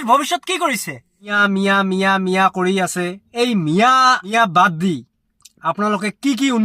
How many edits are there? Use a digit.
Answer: 3